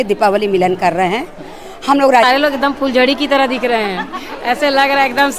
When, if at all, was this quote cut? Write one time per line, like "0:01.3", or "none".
0:02.2

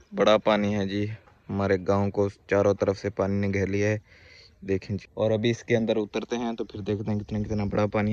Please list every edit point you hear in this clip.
0:06.7

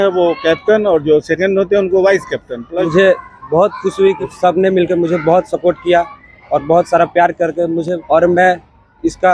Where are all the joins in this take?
0:02.9
0:04.2
0:08.0

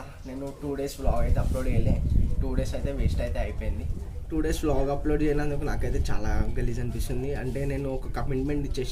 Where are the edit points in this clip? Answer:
none

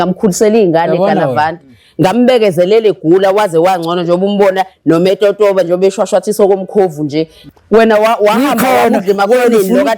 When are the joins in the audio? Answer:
0:07.4

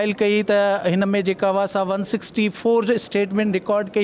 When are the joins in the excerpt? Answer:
none

